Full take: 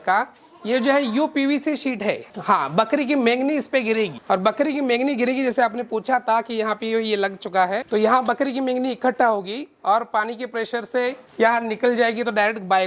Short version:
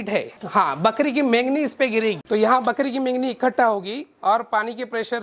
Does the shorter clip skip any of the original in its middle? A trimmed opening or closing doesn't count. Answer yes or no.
yes